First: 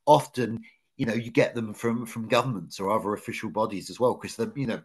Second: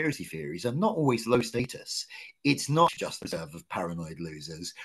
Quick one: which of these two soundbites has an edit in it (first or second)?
second